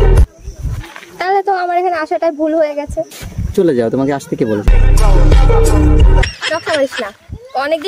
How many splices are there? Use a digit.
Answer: 1